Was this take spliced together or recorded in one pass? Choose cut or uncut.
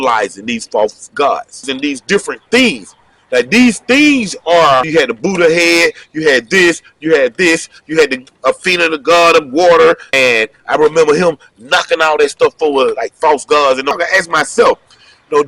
cut